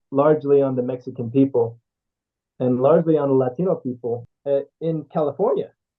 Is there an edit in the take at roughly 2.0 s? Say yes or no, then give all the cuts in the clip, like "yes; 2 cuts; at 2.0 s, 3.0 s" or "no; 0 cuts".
no; 1 cut; at 4.3 s